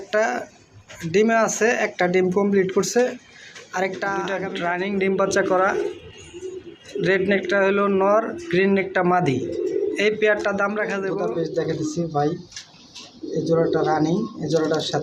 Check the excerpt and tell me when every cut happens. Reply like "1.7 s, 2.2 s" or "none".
4.3 s, 11.2 s

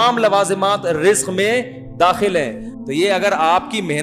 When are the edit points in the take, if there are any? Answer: 2.7 s

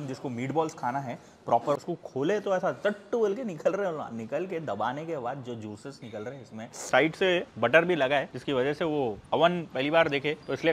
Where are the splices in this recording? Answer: 1.8 s, 6.9 s, 9.2 s

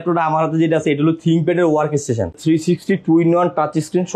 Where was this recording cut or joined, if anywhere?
2.4 s

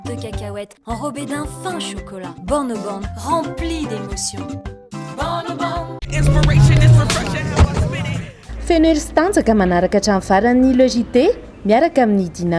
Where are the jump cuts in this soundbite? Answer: 6.0 s

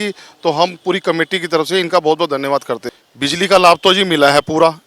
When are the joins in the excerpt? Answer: 3.0 s

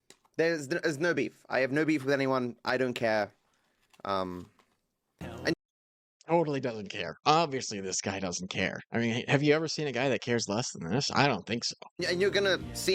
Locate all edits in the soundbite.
0.9 s

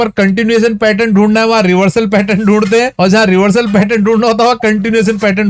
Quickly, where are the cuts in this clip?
none

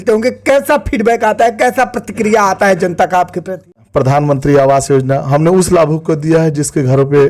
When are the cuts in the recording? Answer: 3.8 s

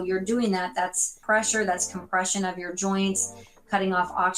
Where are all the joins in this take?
1.1 s

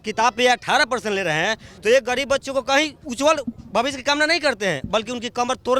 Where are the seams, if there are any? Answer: 3.0 s

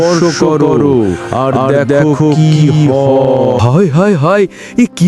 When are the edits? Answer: 3.6 s

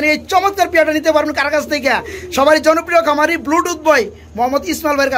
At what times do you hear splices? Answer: none

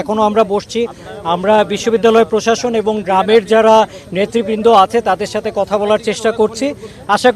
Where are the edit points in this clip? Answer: none

